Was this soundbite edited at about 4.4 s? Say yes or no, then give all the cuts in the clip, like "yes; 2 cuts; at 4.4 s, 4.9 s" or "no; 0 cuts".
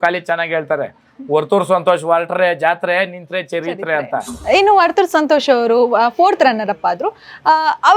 yes; 1 cut; at 4.4 s